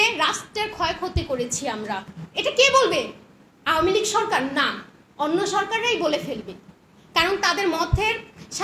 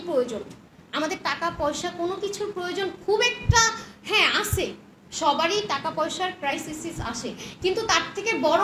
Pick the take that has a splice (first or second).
first